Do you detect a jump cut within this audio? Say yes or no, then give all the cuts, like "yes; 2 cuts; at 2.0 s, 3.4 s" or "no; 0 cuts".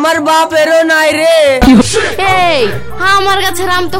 yes; 1 cut; at 1.8 s